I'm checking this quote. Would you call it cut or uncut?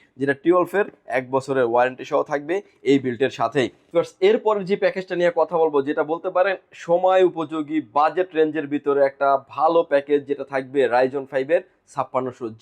uncut